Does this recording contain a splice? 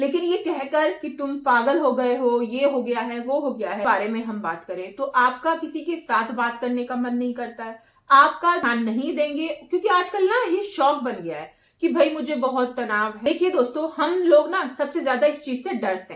yes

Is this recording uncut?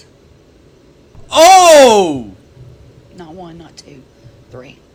yes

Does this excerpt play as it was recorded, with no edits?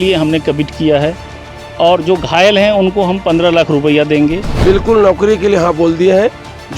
no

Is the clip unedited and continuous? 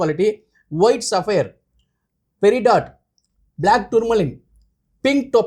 yes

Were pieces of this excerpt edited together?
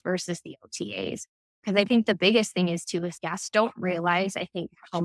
yes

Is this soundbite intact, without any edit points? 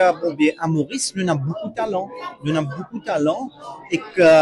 yes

